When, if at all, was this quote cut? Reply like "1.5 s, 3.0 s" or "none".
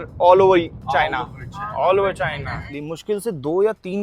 2.7 s

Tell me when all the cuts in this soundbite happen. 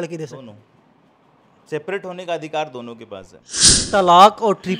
3.8 s

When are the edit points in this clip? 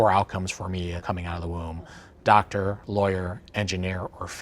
1.0 s

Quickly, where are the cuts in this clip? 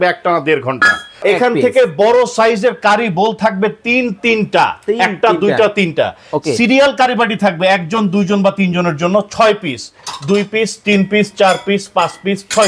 1.2 s

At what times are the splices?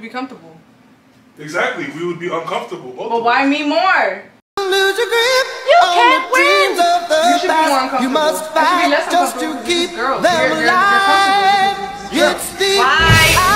none

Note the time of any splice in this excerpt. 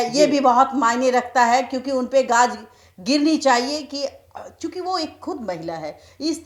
none

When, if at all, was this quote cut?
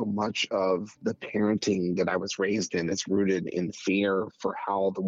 0.9 s

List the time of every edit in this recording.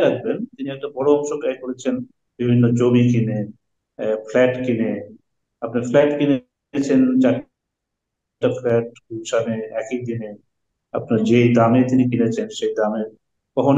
none

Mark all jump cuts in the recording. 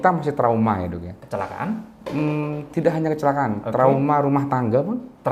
1.1 s

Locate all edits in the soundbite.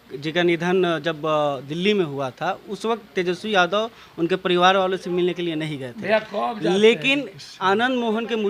none

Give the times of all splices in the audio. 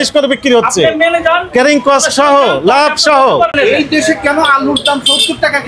3.5 s

